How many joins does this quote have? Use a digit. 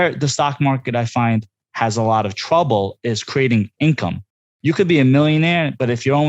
1